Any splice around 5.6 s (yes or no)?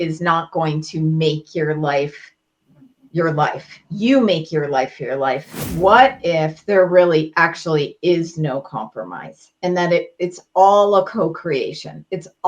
yes